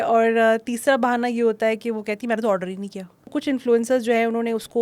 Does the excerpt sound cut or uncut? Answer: cut